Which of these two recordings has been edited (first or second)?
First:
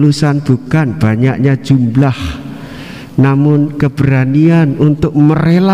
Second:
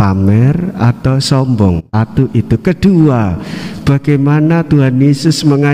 second